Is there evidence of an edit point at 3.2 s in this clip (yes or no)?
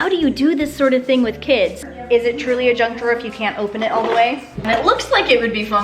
no